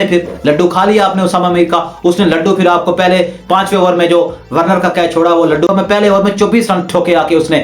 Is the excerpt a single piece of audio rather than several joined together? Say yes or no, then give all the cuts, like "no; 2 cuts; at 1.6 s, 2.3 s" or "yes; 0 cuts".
no; 1 cut; at 5.7 s